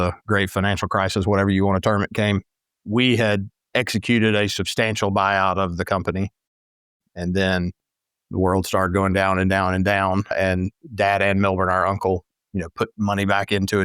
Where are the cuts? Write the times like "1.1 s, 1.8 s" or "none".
10.3 s